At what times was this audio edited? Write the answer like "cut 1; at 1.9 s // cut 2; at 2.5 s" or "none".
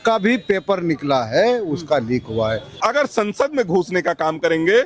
cut 1; at 2.7 s